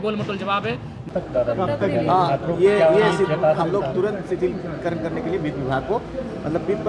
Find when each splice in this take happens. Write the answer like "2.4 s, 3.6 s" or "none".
1.1 s